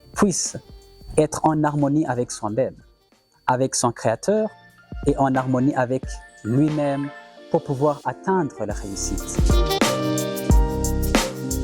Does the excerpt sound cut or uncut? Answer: cut